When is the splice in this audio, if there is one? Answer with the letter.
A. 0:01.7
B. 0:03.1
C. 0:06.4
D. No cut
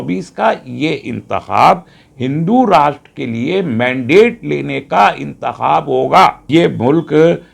C